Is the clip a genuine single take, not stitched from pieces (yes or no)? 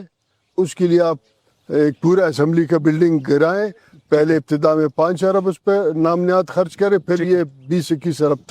yes